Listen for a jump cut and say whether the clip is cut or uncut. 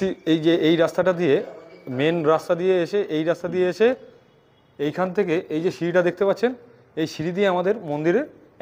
uncut